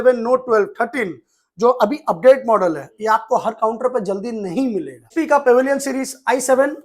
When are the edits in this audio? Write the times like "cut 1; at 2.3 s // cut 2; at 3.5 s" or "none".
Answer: cut 1; at 5.1 s